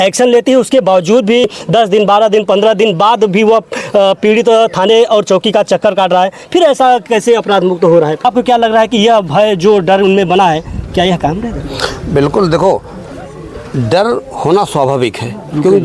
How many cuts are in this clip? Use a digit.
2